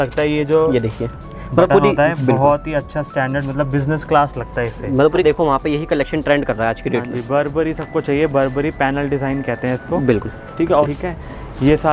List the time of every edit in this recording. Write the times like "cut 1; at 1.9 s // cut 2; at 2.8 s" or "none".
cut 1; at 5.2 s // cut 2; at 10.9 s